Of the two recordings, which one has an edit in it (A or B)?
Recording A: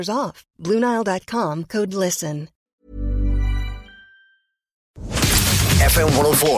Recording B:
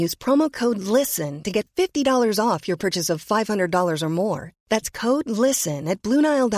A